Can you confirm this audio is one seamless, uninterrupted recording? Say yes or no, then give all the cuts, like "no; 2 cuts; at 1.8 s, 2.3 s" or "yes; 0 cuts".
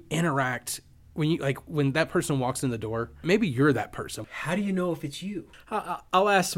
no; 3 cuts; at 3.2 s, 4.2 s, 5.5 s